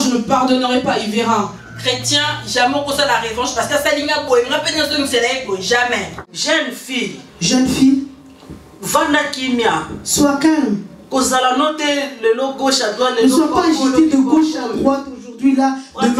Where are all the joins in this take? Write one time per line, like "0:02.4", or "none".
0:06.2